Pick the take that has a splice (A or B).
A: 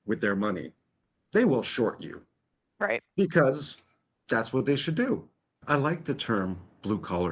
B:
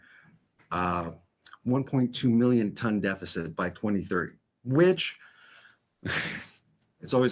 A